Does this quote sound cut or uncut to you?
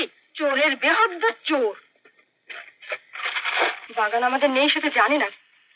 cut